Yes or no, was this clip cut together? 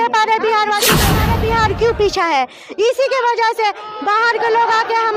yes